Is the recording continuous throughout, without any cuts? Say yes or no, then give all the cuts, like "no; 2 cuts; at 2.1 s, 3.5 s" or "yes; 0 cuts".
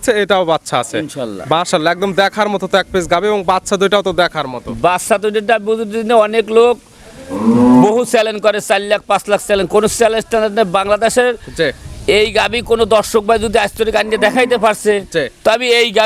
yes; 0 cuts